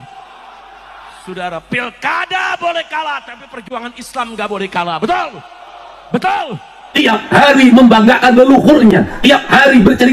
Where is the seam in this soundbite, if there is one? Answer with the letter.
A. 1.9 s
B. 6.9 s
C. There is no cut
B